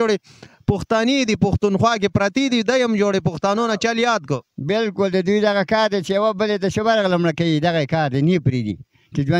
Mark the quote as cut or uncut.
uncut